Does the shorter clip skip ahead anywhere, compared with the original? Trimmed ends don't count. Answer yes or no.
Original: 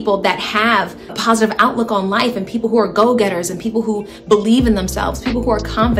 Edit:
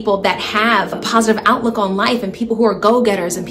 yes